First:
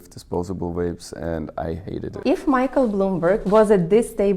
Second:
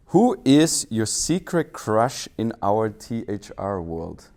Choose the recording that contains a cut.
first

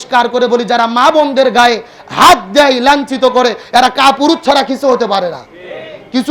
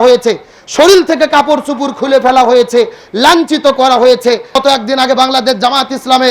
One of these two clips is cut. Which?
second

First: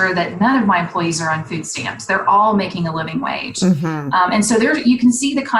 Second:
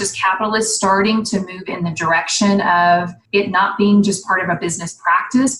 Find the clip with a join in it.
second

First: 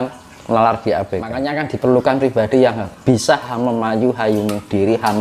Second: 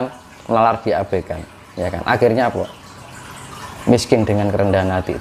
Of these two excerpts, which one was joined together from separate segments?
first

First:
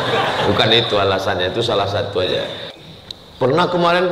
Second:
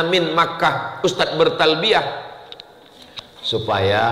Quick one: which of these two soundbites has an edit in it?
first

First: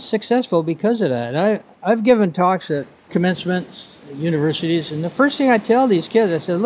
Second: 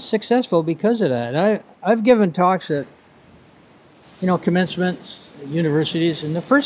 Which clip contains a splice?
first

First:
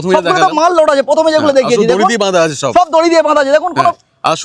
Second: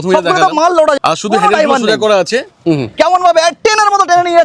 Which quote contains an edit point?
second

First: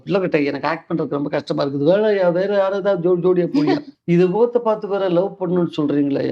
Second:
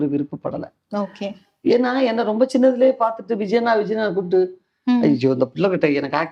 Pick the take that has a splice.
first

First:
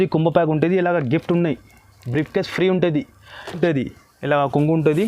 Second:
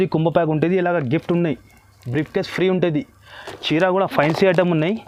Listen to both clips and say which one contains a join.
first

